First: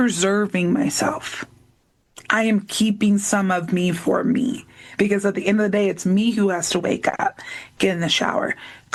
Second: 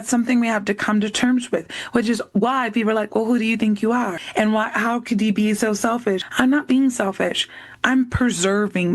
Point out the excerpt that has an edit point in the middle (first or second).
second